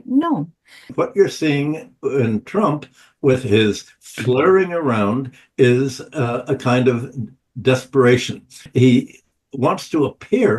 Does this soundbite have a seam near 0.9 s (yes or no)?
yes